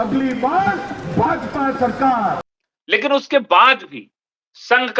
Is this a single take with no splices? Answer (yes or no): yes